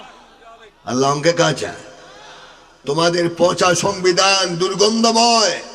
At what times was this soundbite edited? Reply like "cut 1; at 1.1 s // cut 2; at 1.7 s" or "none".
cut 1; at 2.8 s

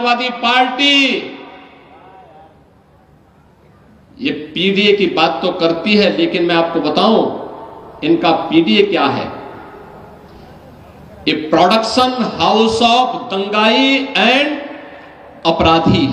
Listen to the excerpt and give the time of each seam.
none

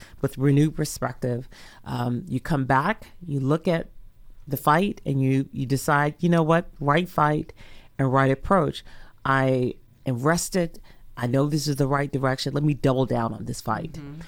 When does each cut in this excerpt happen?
none

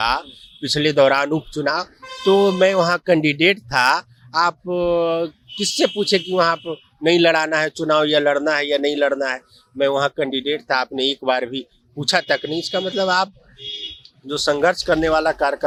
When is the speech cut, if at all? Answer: none

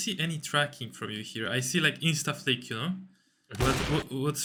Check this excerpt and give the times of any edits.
none

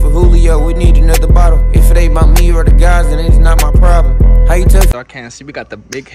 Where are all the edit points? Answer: cut 1; at 4.9 s

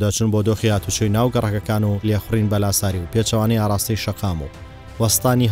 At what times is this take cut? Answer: cut 1; at 2.0 s

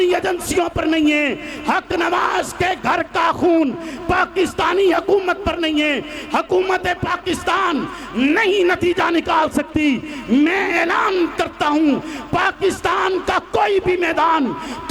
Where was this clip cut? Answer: none

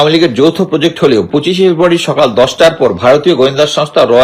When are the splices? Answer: cut 1; at 1.3 s

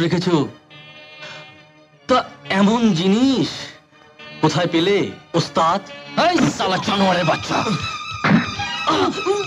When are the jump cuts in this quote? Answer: none

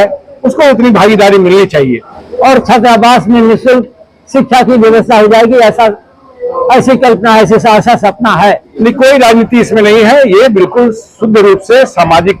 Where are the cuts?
cut 1; at 2.2 s // cut 2; at 8.7 s

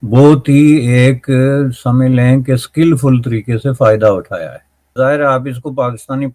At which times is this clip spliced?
cut 1; at 4.9 s

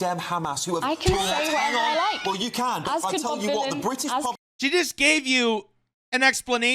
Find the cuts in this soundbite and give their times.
cut 1; at 4.5 s

